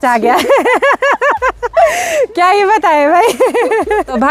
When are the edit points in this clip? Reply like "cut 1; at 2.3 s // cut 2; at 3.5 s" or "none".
none